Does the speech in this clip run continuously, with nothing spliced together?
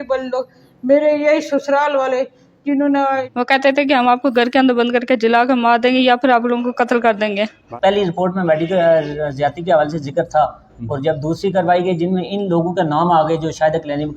no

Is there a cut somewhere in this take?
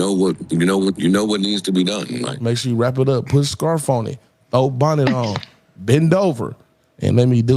yes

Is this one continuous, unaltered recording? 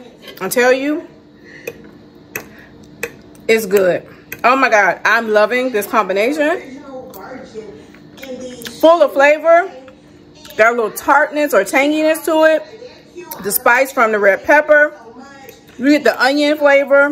yes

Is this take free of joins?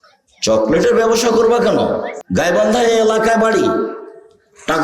no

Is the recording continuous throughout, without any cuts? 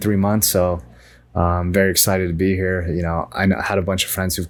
yes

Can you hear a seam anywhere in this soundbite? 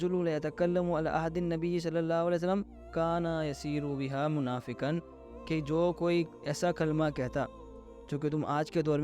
no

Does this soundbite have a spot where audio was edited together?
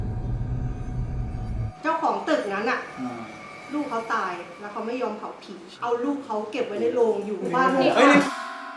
yes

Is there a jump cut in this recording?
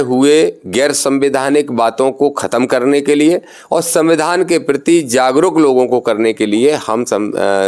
no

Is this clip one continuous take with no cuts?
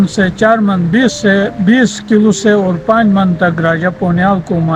yes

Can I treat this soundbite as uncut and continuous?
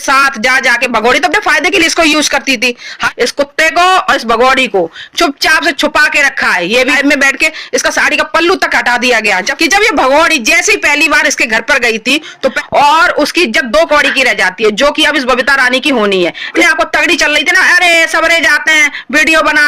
no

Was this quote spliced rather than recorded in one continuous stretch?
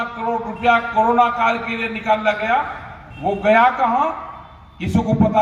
no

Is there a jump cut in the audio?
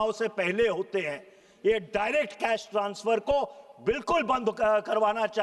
no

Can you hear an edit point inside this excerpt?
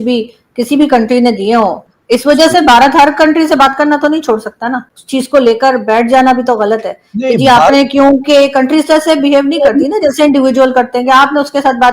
yes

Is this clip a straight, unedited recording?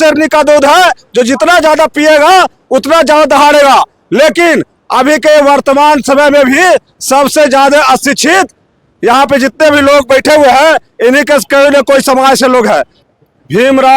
no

